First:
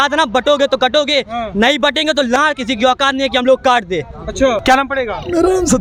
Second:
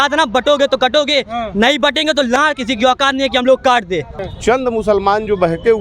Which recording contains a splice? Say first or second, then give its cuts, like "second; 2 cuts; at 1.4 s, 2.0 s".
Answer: second; 1 cut; at 4.2 s